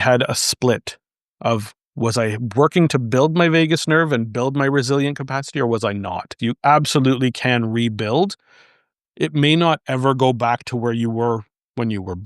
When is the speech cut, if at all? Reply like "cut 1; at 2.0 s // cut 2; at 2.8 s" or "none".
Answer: cut 1; at 6.3 s